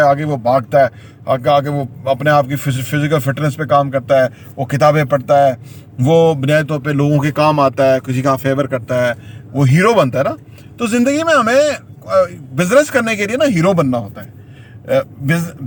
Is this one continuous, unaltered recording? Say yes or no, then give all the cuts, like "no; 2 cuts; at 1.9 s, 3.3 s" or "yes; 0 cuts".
yes; 0 cuts